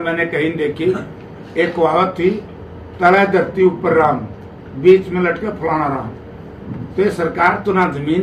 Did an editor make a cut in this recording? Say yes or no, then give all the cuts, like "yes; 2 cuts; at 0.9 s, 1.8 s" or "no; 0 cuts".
no; 0 cuts